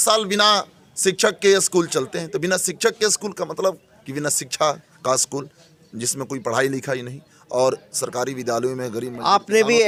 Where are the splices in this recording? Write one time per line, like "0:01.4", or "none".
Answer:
none